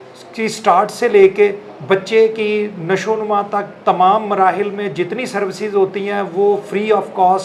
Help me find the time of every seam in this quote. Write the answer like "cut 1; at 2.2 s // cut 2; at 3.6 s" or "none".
none